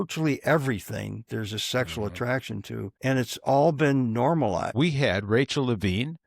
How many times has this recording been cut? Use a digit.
2